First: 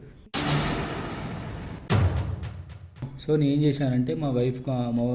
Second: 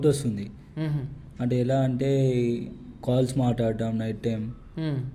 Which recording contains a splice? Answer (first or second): first